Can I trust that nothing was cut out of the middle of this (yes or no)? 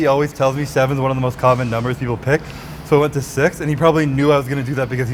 yes